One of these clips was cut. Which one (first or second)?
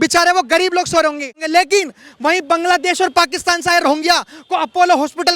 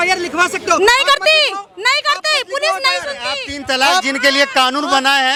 first